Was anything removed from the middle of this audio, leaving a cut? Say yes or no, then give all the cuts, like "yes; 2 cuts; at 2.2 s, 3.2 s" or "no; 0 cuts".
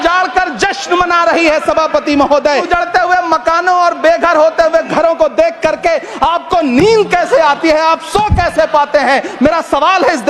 yes; 1 cut; at 2.6 s